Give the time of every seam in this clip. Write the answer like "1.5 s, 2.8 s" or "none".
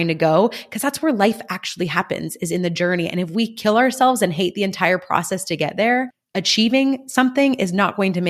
none